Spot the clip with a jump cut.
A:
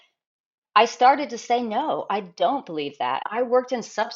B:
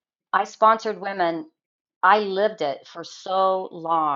A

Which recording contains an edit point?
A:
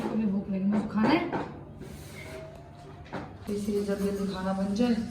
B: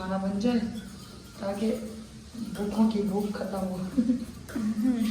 A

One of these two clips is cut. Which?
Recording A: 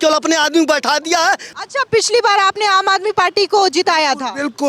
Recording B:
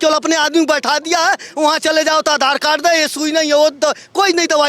A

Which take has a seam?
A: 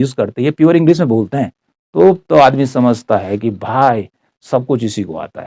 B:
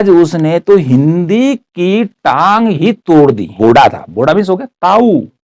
B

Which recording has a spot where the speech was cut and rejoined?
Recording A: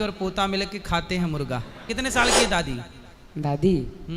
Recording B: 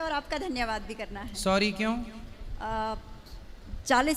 A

